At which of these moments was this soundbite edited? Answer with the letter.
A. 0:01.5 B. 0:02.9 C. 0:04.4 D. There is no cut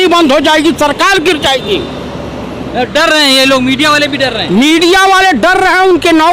D